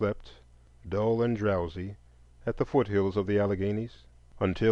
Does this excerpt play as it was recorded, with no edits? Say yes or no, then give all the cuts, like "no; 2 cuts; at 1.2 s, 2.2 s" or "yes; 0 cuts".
yes; 0 cuts